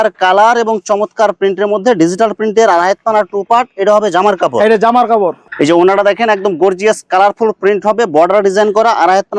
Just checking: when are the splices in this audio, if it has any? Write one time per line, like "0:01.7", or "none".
none